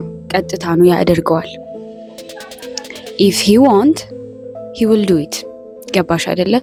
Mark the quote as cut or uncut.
uncut